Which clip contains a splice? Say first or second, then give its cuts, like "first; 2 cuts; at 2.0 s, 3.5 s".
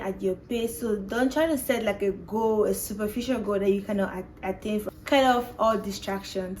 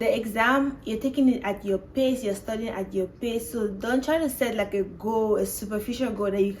first; 1 cut; at 4.8 s